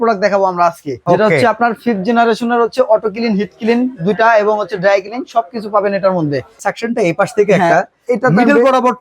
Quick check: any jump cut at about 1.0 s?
yes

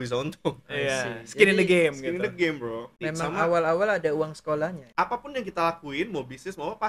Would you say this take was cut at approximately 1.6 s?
no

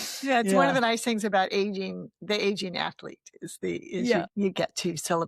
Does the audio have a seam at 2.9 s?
no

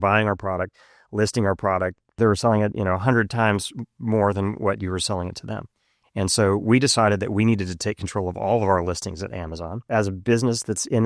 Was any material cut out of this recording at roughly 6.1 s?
no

